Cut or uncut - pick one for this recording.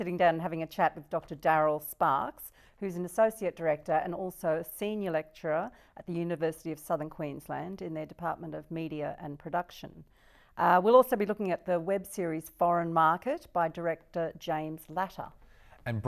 uncut